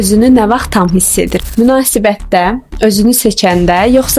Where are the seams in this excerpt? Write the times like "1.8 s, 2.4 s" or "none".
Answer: none